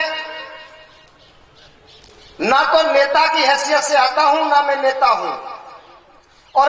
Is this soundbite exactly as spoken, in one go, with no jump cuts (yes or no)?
yes